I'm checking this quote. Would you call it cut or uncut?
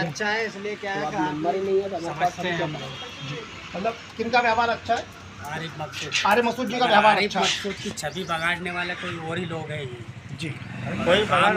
uncut